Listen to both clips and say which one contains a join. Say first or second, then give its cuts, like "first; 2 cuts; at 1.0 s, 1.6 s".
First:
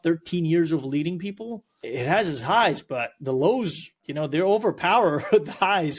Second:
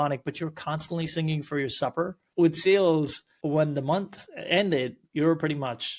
second; 1 cut; at 2.2 s